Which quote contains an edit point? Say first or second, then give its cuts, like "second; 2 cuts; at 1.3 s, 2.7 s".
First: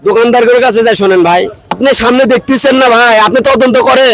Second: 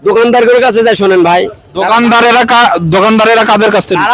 first; 1 cut; at 1.8 s